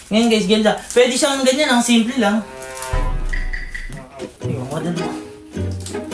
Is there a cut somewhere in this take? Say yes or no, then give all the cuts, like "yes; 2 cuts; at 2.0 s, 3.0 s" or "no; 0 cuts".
yes; 1 cut; at 4.1 s